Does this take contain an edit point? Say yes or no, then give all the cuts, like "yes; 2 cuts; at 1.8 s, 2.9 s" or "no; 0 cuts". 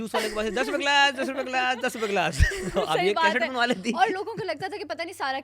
no; 0 cuts